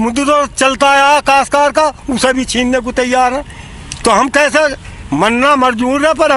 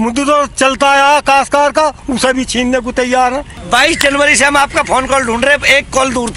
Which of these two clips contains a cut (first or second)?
second